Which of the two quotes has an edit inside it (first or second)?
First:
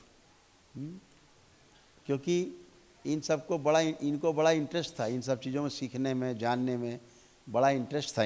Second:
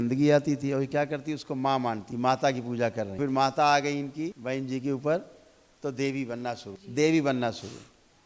second